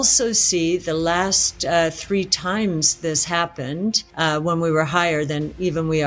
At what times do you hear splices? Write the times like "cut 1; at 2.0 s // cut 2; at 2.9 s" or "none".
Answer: cut 1; at 4.1 s

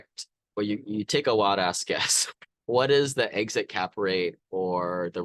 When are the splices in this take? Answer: cut 1; at 2.3 s

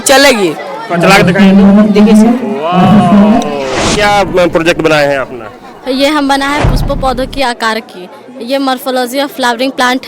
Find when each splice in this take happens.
cut 1; at 3.8 s

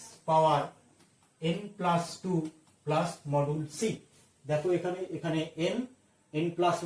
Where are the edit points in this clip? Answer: none

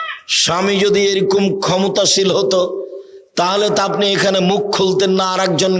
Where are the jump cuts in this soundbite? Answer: none

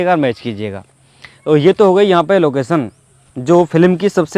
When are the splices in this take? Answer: none

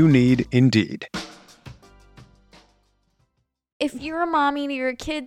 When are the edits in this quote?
cut 1; at 3.7 s

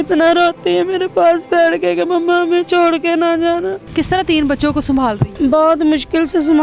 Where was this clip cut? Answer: cut 1; at 3.8 s // cut 2; at 5.3 s

